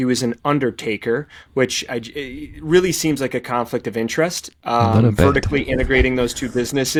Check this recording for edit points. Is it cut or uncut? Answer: uncut